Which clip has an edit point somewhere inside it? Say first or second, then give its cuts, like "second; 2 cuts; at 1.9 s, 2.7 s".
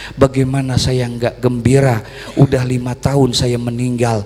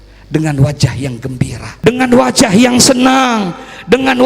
second; 1 cut; at 1.6 s